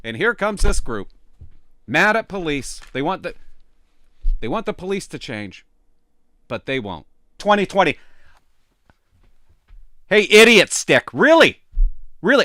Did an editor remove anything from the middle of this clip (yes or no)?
yes